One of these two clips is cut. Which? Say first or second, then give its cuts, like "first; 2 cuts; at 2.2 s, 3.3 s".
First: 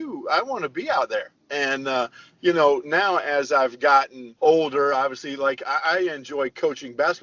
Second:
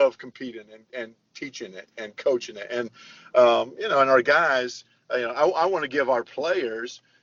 first; 1 cut; at 4.2 s